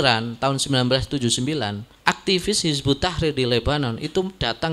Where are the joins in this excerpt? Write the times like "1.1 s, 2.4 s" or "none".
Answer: 1.8 s